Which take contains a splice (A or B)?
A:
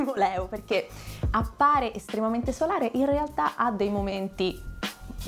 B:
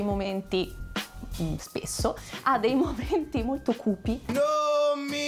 B